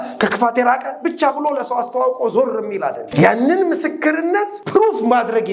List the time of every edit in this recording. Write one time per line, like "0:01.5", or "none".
0:03.1
0:04.6